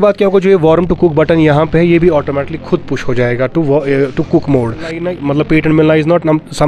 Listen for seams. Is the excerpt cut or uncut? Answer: cut